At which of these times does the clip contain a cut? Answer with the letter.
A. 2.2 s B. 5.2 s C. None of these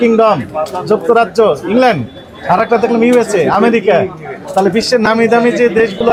C